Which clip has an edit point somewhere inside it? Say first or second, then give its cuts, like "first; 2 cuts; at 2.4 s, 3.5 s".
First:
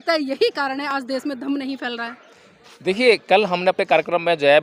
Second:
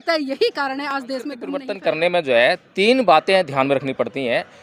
second; 1 cut; at 1.7 s